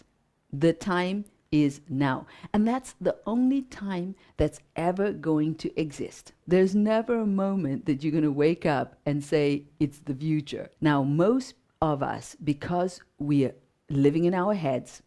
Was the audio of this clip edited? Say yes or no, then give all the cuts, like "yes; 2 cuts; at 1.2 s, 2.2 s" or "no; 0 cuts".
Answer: yes; 2 cuts; at 6.4 s, 10.6 s